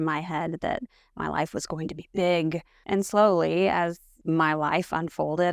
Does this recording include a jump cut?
yes; 2 cuts; at 2.8 s, 4.1 s

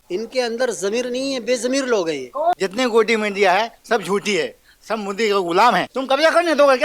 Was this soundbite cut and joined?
yes; 2 cuts; at 2.6 s, 5.9 s

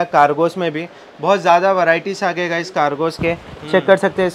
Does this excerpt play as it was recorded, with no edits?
yes; 0 cuts

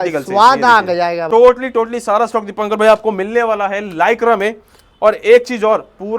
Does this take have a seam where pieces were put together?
yes; 1 cut; at 1.2 s

